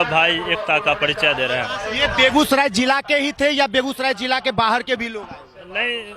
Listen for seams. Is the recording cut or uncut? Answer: uncut